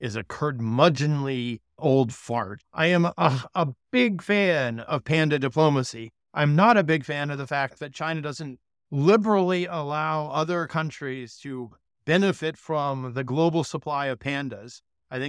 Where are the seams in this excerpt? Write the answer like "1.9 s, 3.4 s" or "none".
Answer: 1.7 s, 2.6 s